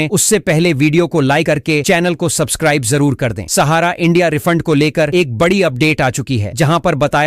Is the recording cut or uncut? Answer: uncut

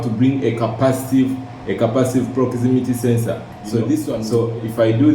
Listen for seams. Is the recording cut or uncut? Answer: cut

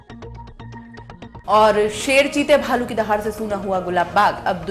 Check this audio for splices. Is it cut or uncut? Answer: uncut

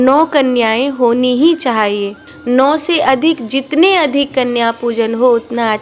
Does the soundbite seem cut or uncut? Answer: cut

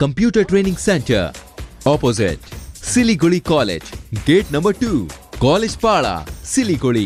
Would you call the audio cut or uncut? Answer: uncut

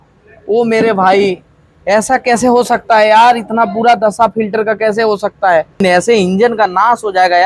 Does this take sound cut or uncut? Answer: cut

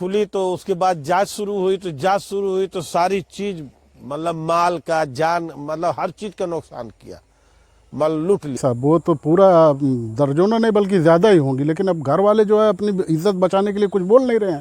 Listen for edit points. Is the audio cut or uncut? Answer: cut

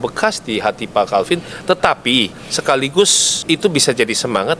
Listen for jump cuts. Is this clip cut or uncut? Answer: cut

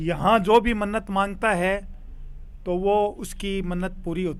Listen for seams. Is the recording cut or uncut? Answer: uncut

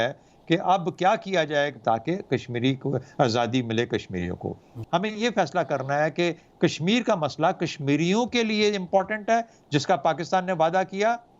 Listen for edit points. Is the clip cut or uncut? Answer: cut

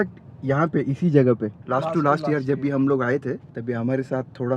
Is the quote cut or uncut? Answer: cut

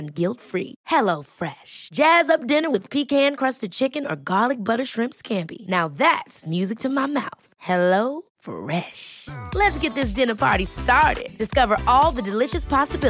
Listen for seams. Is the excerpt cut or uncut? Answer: uncut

